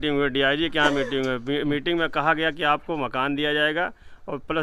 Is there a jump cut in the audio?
no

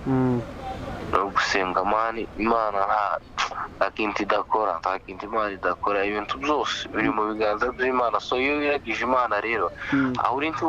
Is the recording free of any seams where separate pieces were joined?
yes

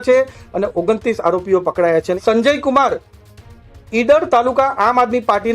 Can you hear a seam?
yes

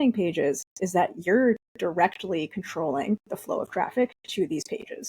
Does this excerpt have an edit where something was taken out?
yes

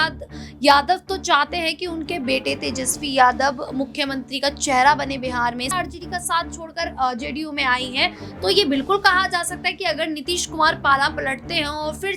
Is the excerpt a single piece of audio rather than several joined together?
no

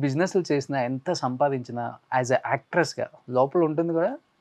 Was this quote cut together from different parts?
yes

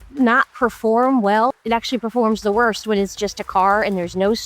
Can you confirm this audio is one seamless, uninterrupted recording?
no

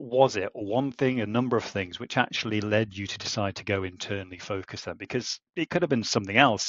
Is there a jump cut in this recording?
no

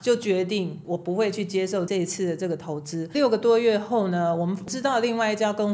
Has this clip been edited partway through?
yes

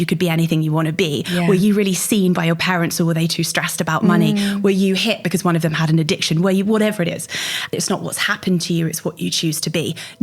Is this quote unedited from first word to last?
no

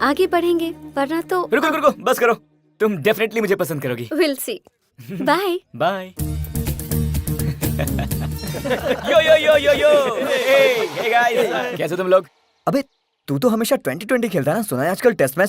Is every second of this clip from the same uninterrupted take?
no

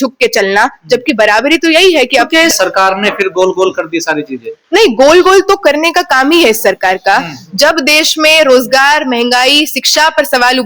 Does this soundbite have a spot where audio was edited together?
yes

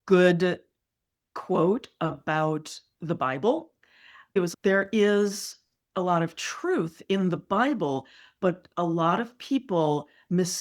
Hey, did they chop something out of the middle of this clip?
yes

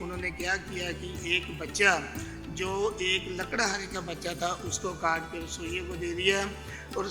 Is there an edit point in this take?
no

